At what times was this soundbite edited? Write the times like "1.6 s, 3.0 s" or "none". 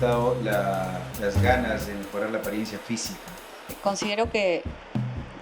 3.8 s